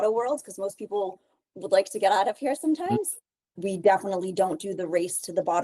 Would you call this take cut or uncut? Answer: cut